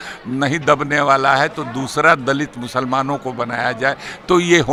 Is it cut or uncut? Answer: uncut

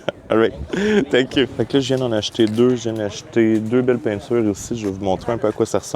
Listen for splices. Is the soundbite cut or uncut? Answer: cut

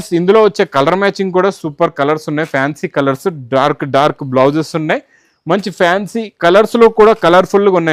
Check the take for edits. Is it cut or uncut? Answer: uncut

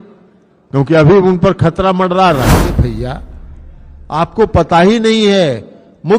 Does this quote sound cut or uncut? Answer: cut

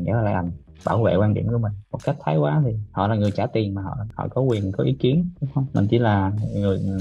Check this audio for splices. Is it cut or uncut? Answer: uncut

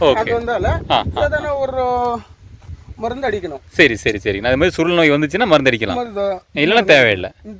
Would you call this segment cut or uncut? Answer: uncut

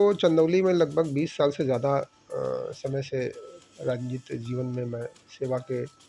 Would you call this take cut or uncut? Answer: uncut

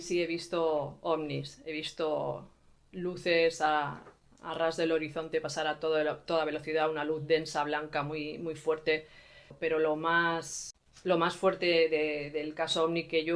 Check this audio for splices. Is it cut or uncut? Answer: cut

